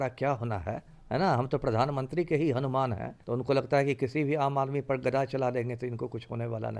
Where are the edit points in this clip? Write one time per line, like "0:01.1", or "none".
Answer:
0:03.1